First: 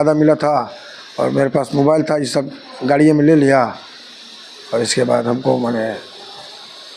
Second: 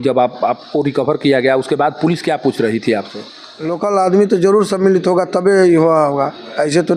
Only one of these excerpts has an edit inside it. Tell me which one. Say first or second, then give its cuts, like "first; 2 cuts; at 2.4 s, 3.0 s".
second; 1 cut; at 3.7 s